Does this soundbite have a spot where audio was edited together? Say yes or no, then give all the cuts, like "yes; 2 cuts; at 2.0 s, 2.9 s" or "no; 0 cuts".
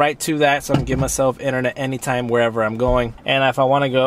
yes; 1 cut; at 3.1 s